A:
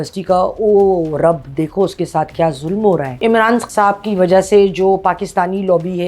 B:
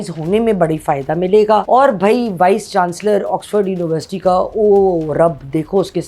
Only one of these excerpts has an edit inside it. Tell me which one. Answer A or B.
A